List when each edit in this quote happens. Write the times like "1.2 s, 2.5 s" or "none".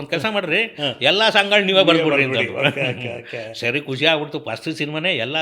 none

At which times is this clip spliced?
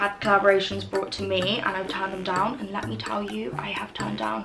none

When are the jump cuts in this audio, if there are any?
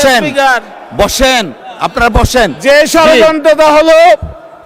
none

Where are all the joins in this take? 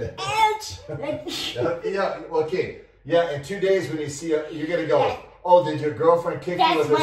none

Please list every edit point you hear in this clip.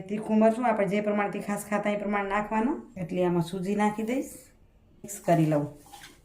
2.9 s, 5.1 s

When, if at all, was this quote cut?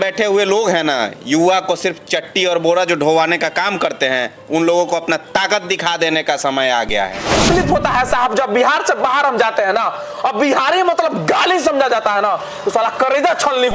7.4 s

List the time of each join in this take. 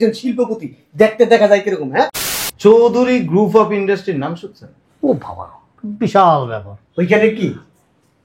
2.2 s

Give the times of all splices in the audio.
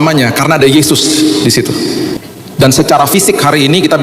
2.2 s

